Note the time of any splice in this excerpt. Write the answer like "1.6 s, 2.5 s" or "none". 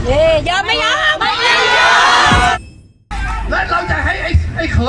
2.6 s